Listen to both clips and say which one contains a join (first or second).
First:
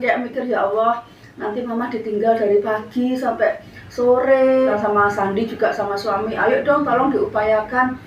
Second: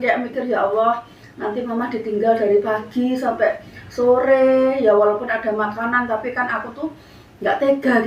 first